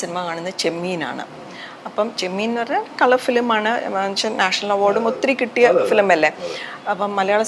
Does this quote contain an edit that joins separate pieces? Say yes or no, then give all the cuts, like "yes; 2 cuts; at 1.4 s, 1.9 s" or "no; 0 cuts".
no; 0 cuts